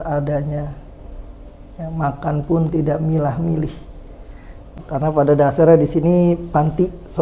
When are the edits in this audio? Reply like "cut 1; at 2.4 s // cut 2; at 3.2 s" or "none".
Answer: cut 1; at 4.8 s

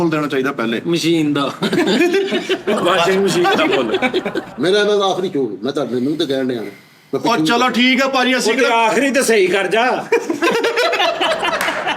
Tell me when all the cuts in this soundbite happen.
cut 1; at 4.4 s

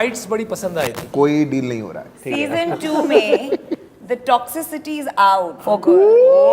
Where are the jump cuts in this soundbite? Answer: cut 1; at 1.0 s // cut 2; at 2.3 s // cut 3; at 5.6 s

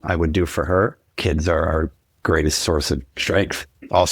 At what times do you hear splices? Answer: cut 1; at 1.1 s

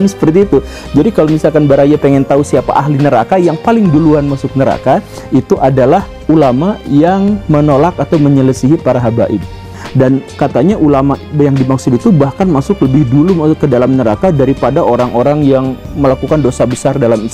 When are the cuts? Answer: cut 1; at 9.8 s

